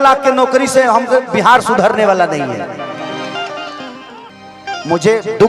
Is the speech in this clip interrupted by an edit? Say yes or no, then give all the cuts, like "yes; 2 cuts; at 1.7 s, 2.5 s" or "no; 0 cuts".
yes; 1 cut; at 4.3 s